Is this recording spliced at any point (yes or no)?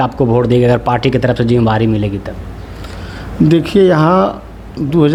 no